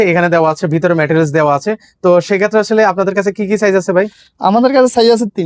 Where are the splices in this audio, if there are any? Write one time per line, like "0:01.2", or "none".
none

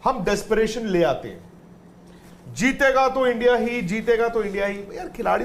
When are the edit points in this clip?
none

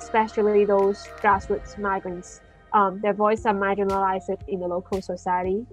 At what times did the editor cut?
none

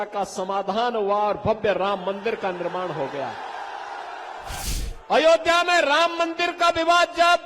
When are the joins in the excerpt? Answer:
0:04.6

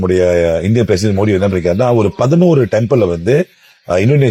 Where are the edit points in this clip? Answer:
none

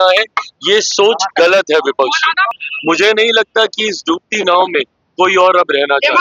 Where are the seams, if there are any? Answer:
0:02.5
0:04.5

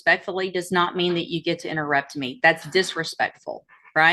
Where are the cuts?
none

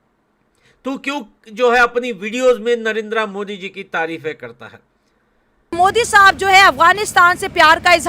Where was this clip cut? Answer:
0:05.7

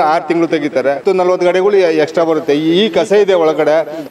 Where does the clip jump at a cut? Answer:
0:01.0

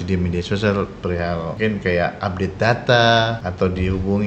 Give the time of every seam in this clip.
0:01.5
0:03.4

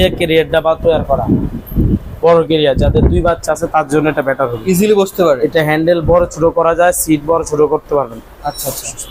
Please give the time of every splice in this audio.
none

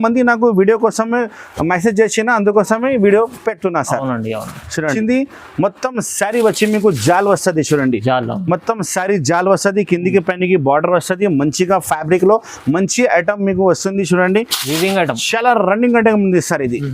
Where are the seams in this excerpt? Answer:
0:05.0

